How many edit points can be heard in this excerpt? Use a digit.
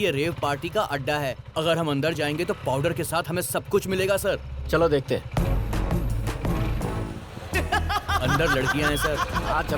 0